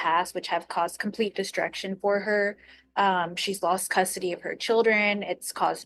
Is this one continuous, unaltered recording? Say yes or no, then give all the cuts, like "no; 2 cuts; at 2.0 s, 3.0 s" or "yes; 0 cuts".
yes; 0 cuts